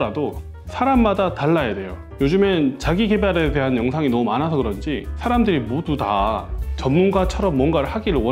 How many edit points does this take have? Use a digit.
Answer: 0